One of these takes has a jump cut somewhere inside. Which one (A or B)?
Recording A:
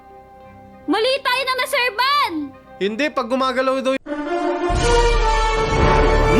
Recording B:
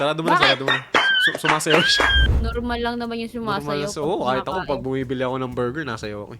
B